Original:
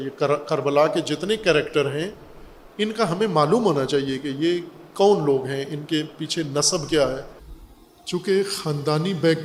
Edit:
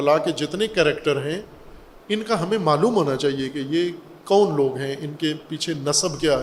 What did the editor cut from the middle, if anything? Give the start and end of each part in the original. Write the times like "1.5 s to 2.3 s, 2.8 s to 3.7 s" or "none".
none